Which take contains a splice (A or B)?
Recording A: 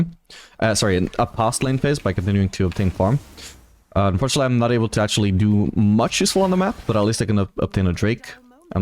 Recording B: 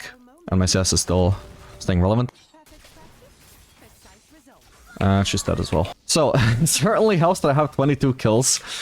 B